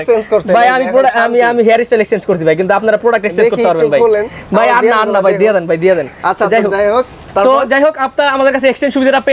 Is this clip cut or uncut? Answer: uncut